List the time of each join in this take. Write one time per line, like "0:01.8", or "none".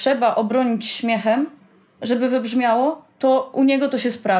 none